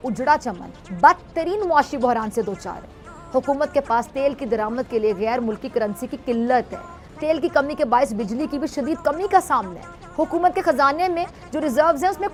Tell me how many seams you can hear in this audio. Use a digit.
0